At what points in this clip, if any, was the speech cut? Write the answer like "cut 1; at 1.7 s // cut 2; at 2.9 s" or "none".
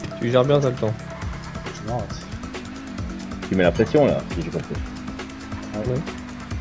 none

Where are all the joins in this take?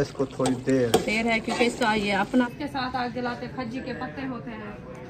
cut 1; at 2.4 s

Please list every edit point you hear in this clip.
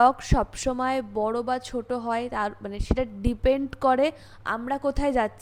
none

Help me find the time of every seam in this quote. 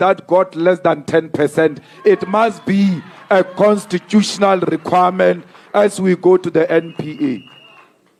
none

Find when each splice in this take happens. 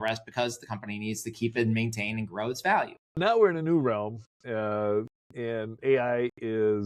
cut 1; at 3.2 s

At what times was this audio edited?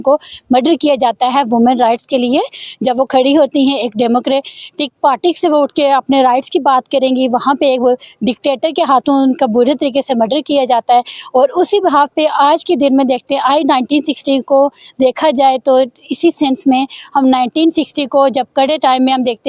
none

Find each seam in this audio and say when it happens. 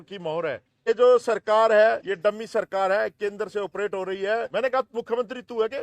cut 1; at 0.9 s // cut 2; at 2.1 s // cut 3; at 4.5 s

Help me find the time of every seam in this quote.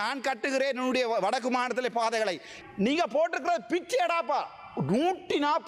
cut 1; at 2.5 s

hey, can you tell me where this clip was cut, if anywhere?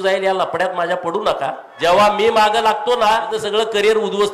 cut 1; at 1.7 s // cut 2; at 3.3 s

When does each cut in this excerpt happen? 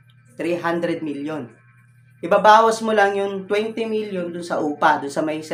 none

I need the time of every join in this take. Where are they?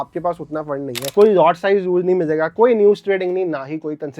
cut 1; at 1.1 s

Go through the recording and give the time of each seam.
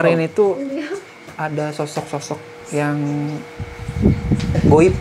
none

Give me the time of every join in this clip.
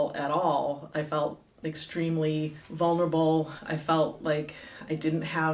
cut 1; at 2.6 s // cut 2; at 3.6 s

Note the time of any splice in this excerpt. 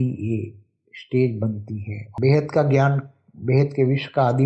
cut 1; at 2.1 s

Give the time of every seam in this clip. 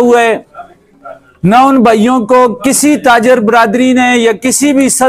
none

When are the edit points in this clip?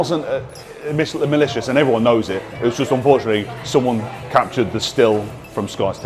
none

